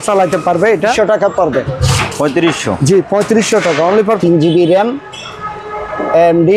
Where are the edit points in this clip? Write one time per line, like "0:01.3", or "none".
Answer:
0:00.9
0:04.2